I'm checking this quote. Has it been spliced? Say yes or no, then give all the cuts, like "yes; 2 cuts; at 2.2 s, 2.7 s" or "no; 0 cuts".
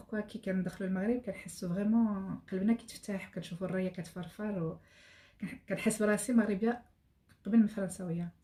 no; 0 cuts